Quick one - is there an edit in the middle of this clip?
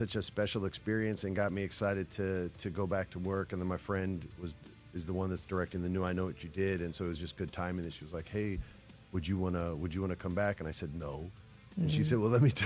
no; 0 cuts

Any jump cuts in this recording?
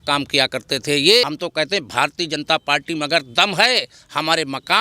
yes; 1 cut; at 1.3 s

